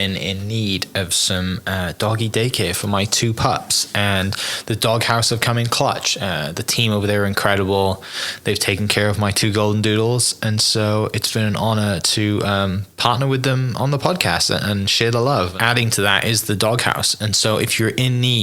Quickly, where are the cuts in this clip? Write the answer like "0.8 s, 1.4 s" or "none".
15.5 s

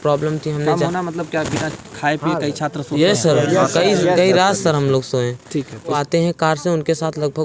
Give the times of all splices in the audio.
6.0 s

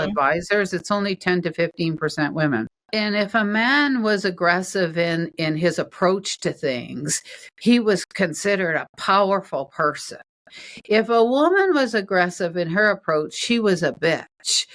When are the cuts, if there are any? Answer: 2.8 s

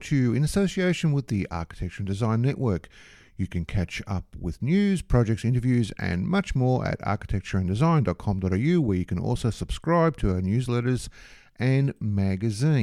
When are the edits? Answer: none

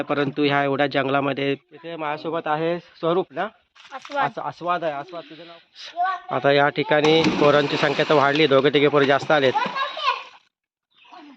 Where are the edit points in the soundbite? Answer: 2.0 s, 5.2 s

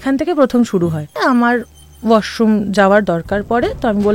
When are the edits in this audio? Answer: 1.2 s

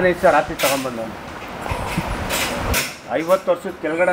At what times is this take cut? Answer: 2.7 s

